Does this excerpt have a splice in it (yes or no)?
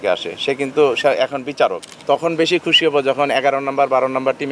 yes